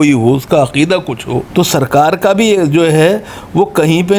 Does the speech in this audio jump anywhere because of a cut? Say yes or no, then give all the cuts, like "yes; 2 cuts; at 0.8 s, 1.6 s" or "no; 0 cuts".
yes; 1 cut; at 1.4 s